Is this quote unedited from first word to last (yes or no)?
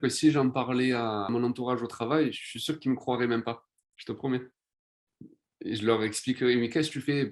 yes